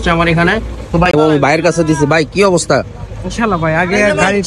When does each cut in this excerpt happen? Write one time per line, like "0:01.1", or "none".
0:01.1